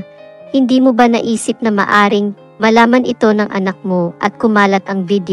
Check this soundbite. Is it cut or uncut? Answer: uncut